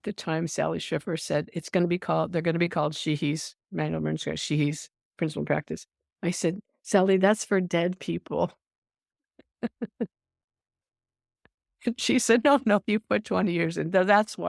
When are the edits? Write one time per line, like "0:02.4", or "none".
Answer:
none